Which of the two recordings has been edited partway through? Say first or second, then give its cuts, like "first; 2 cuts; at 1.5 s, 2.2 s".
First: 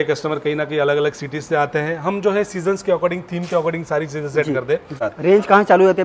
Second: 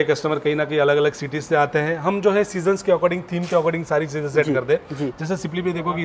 first; 1 cut; at 5.0 s